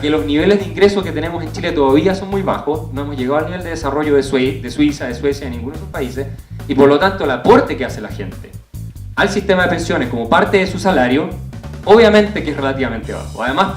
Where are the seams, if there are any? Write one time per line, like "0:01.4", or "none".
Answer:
0:07.2